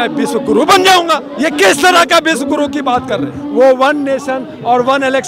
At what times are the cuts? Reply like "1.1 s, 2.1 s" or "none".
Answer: 1.2 s, 3.4 s